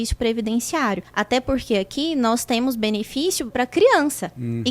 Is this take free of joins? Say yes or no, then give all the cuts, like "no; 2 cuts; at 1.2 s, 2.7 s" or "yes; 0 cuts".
no; 2 cuts; at 1.1 s, 3.5 s